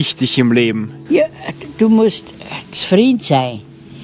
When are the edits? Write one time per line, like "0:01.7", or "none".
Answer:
0:00.9

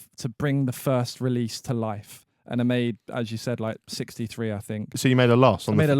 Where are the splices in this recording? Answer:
0:05.0

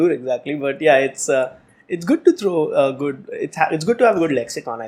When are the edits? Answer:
none

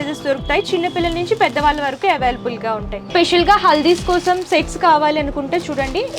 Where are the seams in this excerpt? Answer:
0:02.9

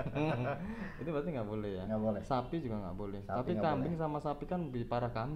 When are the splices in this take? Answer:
none

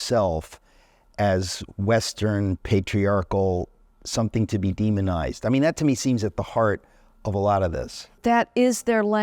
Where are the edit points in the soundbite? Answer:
0:08.1

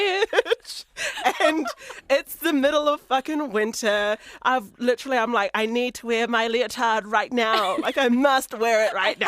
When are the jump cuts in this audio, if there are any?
0:04.3

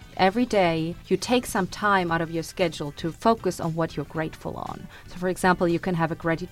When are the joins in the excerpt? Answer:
0:01.0

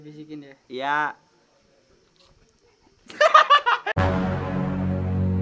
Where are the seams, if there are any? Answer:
0:03.9

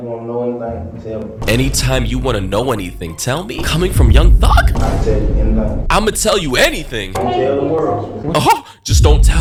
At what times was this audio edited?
none

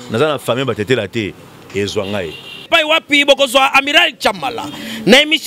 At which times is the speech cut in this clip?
0:02.6

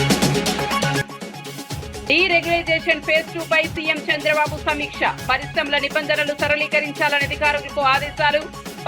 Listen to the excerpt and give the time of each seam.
0:01.0

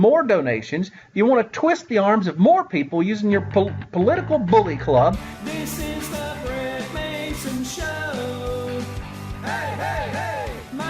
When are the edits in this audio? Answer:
0:05.3

